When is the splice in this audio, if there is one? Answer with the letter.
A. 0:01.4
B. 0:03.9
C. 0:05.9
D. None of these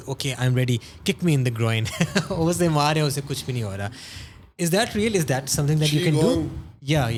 D